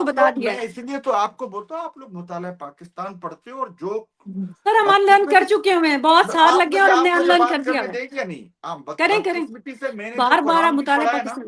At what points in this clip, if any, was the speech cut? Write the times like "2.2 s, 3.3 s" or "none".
none